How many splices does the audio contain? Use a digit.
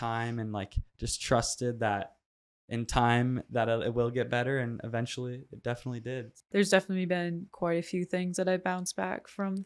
1